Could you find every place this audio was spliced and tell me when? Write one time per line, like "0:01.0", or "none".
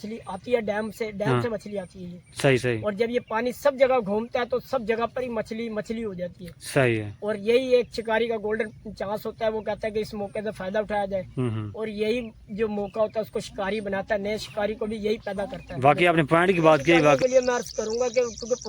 0:17.2